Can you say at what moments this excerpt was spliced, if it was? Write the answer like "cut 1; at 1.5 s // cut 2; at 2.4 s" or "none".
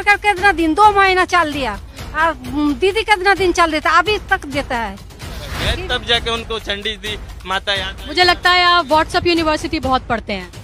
cut 1; at 5.6 s